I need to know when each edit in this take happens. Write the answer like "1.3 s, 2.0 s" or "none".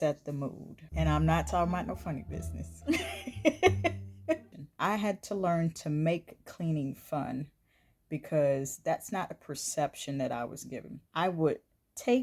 4.5 s, 11.0 s